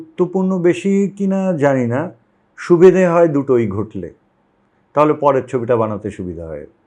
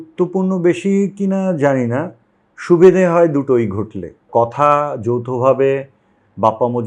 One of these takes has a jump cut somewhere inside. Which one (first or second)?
second